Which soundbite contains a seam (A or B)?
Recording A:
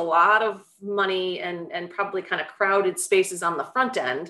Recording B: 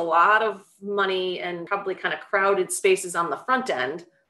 B